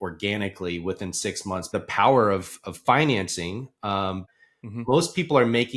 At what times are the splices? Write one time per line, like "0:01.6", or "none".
0:01.8
0:04.2